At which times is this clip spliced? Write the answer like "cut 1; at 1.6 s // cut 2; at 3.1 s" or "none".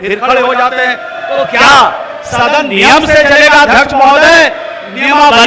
none